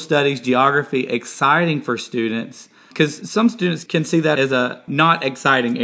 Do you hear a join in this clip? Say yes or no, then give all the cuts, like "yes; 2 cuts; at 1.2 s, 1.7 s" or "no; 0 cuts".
no; 0 cuts